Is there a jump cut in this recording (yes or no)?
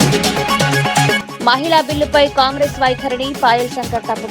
yes